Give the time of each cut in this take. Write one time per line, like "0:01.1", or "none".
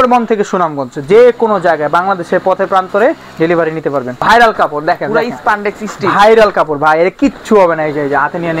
0:04.1